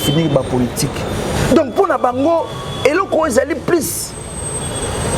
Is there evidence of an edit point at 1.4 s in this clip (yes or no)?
yes